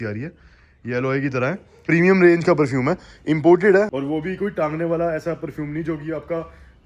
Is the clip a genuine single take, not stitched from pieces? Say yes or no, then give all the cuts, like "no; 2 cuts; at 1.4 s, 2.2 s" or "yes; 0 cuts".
no; 2 cuts; at 1.8 s, 3.9 s